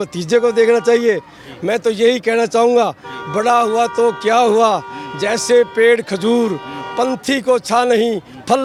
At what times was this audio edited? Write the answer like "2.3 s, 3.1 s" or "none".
none